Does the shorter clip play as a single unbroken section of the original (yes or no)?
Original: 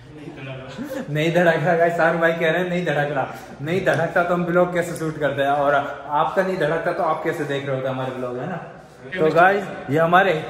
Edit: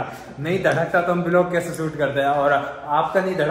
yes